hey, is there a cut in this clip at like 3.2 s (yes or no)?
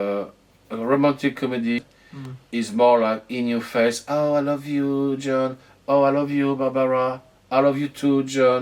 no